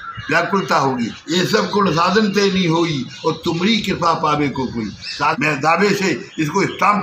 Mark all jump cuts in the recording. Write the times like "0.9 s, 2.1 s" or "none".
1.2 s, 5.4 s

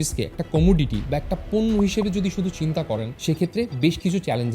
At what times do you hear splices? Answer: 3.1 s

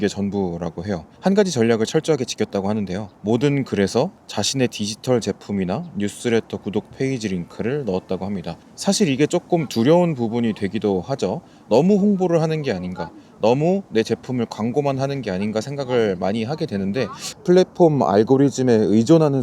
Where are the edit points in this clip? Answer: 1.0 s, 3.1 s, 4.2 s, 17.2 s

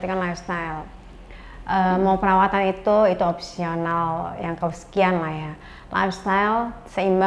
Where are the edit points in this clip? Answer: none

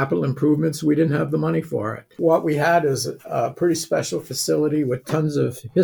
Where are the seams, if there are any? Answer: 2.2 s

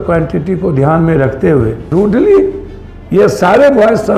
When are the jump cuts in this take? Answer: 1.9 s

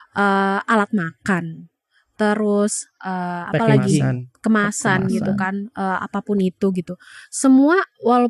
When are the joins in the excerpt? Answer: none

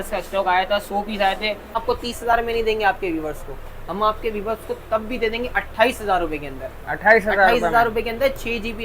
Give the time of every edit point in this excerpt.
1.8 s

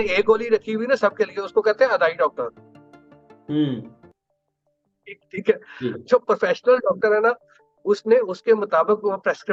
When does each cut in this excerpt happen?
none

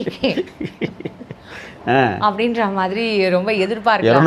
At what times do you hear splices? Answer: none

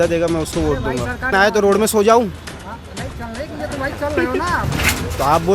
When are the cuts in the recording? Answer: 1.3 s

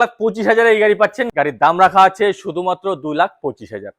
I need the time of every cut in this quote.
1.2 s

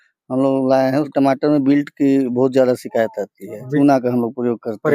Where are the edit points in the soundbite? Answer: 1.1 s, 3.6 s

